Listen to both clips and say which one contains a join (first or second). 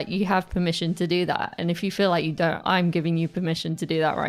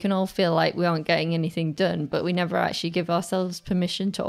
first